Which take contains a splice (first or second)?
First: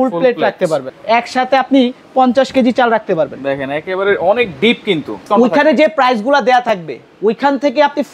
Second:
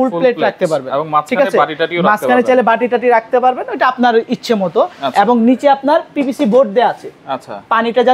first